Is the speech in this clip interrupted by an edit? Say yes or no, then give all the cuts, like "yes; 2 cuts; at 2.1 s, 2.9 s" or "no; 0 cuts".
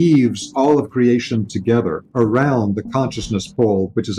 no; 0 cuts